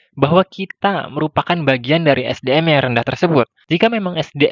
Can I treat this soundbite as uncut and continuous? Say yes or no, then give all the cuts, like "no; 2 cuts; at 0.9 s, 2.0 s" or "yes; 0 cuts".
no; 1 cut; at 3.6 s